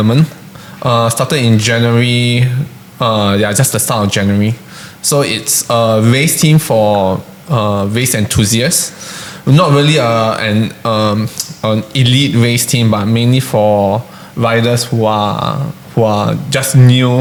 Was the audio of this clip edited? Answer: no; 0 cuts

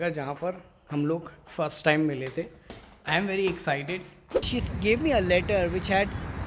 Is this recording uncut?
no; 1 cut; at 4.3 s

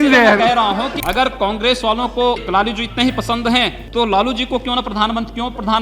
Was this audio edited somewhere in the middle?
yes; 3 cuts; at 1.0 s, 2.4 s, 3.8 s

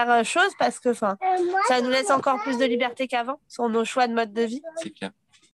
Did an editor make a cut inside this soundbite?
no; 0 cuts

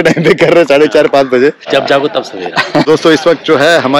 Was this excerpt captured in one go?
no; 2 cuts; at 1.6 s, 2.9 s

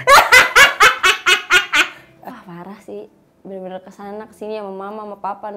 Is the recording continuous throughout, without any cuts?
no; 1 cut; at 2.0 s

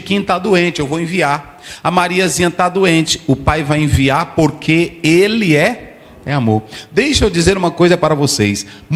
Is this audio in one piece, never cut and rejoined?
yes; 0 cuts

